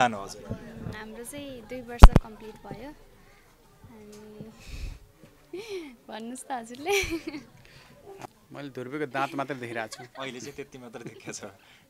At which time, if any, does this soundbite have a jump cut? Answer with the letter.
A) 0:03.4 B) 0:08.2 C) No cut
B